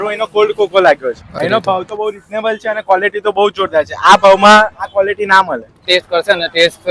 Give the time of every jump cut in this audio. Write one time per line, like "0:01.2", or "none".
0:01.3
0:05.9